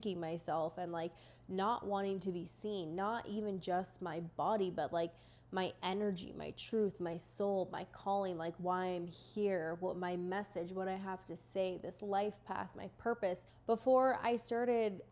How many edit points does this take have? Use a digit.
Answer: 1